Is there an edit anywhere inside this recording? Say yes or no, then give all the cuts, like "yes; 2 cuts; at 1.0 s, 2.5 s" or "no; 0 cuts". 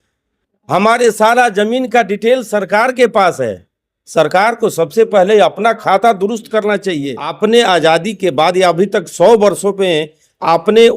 yes; 1 cut; at 7.3 s